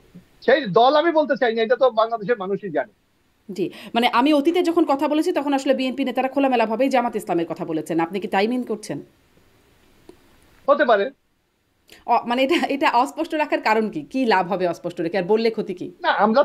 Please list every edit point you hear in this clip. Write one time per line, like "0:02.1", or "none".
none